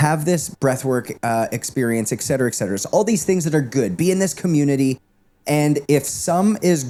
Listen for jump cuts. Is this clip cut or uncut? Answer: uncut